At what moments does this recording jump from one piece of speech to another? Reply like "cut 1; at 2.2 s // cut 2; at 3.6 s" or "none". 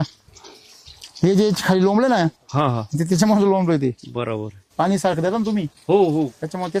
none